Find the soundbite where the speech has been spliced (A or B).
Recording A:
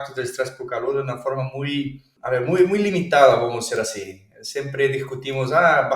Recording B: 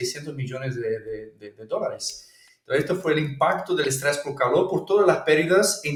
A